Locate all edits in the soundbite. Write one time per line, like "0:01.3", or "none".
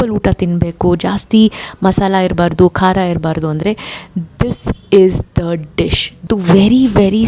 0:06.3